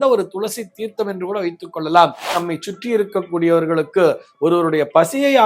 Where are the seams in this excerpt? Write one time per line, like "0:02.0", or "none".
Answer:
0:02.3